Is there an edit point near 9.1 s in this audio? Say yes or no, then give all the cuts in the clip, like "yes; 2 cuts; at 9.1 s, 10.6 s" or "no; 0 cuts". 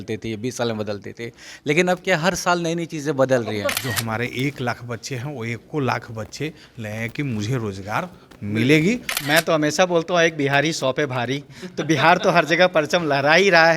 yes; 2 cuts; at 3.8 s, 9.1 s